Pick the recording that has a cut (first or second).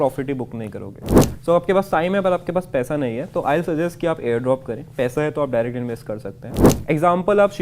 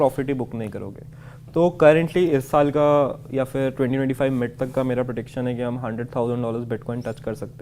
first